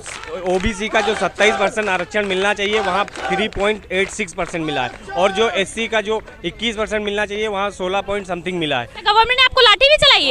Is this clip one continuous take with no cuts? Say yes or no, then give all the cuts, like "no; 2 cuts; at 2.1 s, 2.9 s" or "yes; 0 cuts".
no; 1 cut; at 9.0 s